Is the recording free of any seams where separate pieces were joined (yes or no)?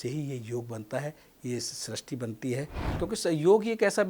no